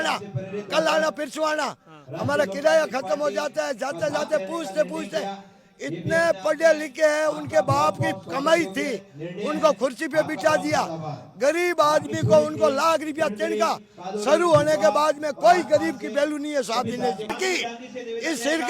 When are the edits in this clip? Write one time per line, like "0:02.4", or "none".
0:17.4